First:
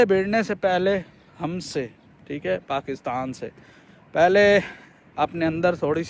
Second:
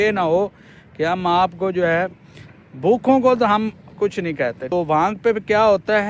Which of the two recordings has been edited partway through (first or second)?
second